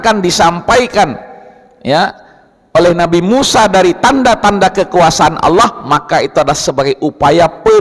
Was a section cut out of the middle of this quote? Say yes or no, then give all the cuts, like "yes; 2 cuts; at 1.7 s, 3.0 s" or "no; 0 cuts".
no; 0 cuts